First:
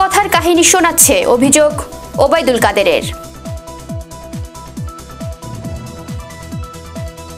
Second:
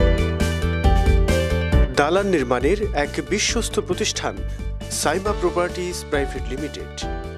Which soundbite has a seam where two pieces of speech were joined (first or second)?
first